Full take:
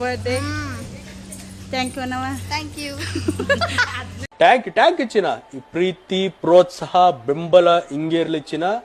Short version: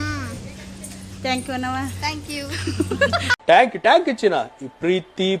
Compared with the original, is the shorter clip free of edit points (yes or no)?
no